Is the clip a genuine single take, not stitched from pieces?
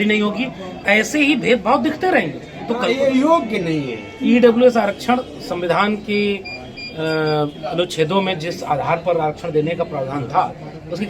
no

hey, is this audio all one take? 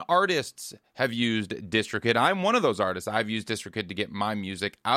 yes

